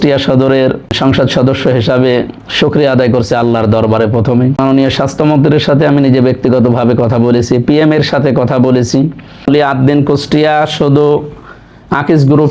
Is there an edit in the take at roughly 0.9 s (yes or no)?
yes